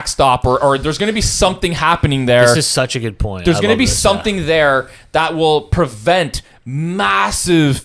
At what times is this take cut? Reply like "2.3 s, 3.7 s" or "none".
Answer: none

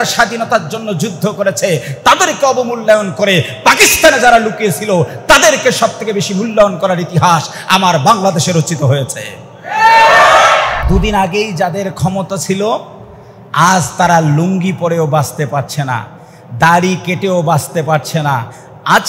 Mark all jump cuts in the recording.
10.8 s

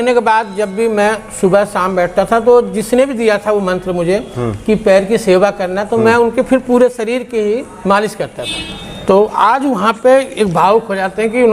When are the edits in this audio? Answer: 8.5 s

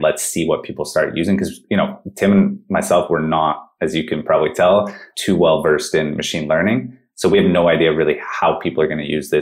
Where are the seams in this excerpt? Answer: none

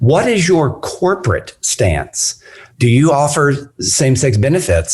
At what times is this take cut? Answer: 2.6 s

